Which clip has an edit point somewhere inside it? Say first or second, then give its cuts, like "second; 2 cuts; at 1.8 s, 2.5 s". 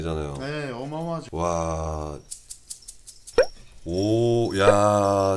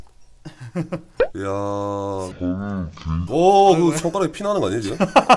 first; 1 cut; at 3.2 s